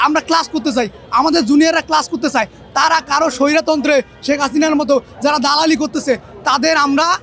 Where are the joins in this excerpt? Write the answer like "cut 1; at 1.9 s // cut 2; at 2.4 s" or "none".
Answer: none